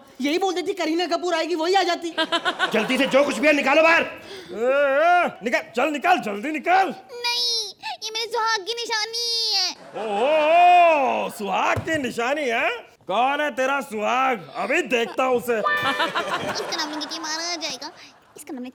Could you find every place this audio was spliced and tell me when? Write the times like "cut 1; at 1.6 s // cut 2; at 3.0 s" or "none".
none